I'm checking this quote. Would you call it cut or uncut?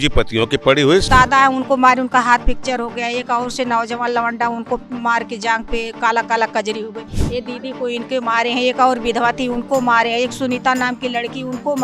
cut